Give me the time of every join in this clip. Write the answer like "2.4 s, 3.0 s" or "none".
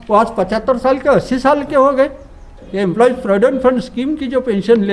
2.7 s